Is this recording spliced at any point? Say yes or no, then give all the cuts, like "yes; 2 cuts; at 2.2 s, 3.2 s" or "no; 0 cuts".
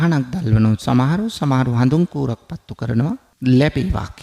yes; 1 cut; at 3.3 s